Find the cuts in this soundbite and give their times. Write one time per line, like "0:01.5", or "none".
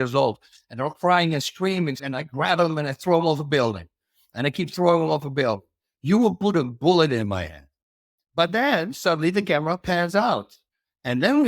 0:02.1